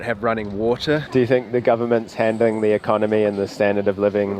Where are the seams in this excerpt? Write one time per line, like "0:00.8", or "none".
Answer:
0:01.1

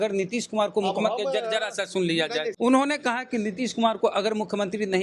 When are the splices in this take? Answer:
0:02.5

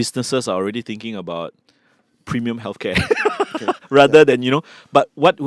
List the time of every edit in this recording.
none

